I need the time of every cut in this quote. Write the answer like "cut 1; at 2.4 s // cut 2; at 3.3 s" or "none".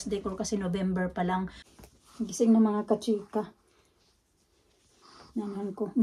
cut 1; at 1.6 s